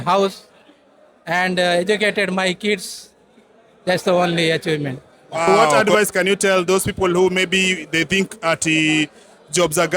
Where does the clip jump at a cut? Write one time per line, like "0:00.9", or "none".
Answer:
0:05.7